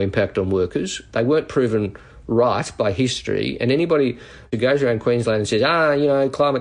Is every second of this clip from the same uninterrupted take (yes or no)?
no